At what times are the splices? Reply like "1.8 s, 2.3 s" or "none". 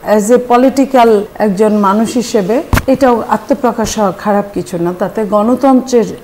1.3 s, 2.7 s